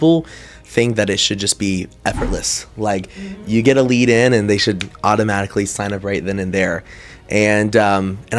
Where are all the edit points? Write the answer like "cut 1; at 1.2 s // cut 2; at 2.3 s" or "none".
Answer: none